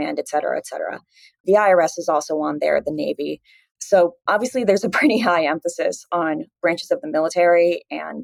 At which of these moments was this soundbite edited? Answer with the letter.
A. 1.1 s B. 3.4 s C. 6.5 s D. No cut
D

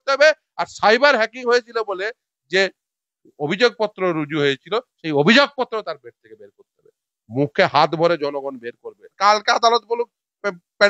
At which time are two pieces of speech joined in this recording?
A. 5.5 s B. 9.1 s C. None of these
B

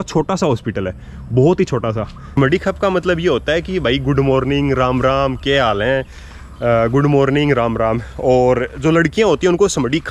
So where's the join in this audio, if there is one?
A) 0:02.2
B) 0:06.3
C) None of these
C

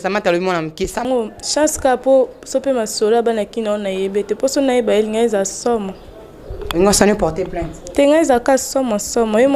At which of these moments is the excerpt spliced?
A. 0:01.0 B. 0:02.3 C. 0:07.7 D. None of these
A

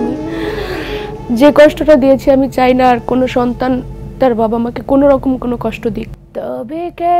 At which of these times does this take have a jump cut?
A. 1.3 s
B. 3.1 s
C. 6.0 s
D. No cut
C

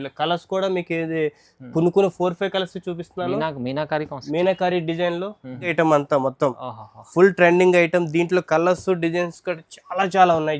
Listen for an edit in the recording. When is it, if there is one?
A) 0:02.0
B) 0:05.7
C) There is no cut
B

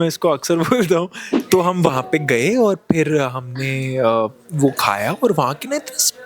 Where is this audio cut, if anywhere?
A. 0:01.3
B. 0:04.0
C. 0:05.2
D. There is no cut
A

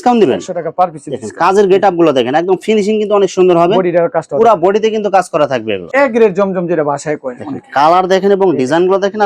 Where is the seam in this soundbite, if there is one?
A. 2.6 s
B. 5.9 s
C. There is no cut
B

